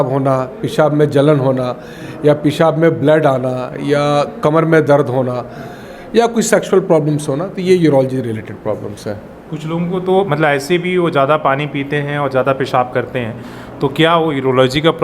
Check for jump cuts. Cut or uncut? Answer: uncut